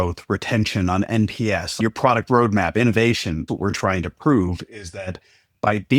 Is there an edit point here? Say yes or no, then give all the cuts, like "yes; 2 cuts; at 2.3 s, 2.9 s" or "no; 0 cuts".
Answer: yes; 2 cuts; at 1.8 s, 3.5 s